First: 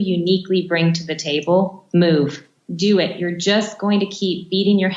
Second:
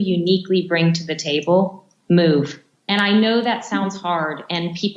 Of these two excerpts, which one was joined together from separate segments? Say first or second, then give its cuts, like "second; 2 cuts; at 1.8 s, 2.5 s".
first; 2 cuts; at 1.8 s, 2.5 s